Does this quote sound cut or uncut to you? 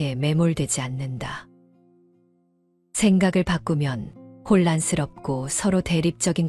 cut